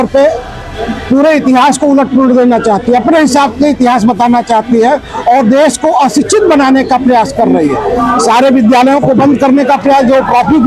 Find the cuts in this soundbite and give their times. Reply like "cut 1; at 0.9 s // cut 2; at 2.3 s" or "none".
none